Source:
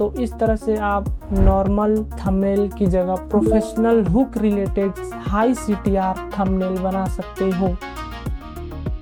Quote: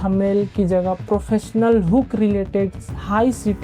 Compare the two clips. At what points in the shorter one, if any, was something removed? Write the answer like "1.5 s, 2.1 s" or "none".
none